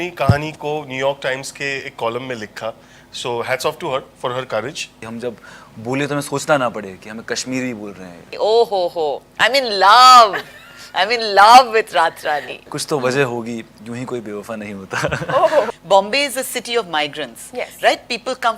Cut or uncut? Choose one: cut